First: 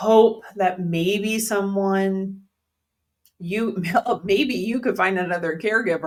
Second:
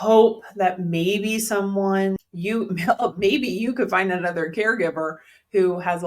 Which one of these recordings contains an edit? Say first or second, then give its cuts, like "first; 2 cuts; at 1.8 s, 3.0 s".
second; 1 cut; at 2.2 s